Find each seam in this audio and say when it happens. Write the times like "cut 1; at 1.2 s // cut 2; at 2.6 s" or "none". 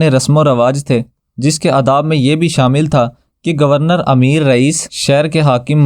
cut 1; at 1.2 s // cut 2; at 4.9 s